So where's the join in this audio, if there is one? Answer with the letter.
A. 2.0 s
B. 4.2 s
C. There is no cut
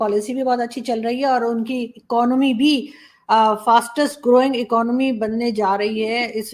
C